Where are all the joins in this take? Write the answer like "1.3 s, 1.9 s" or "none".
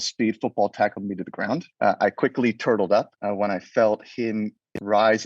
1.7 s, 3.2 s